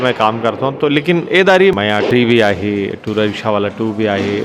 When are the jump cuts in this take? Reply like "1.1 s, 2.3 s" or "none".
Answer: 1.8 s